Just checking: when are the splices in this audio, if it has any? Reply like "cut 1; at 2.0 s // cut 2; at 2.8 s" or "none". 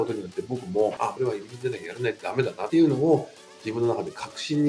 cut 1; at 1.1 s // cut 2; at 2.6 s